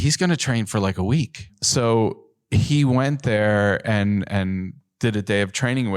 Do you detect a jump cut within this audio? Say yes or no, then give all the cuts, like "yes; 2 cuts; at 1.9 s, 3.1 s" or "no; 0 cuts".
yes; 1 cut; at 1.6 s